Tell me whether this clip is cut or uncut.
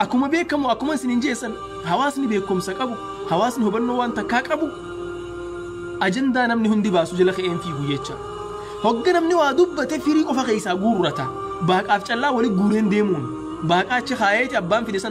cut